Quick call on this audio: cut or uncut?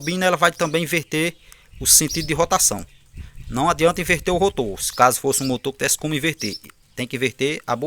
uncut